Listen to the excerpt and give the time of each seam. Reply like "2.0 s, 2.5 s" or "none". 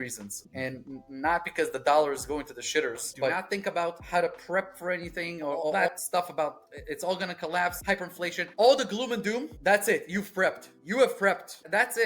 3.3 s, 5.7 s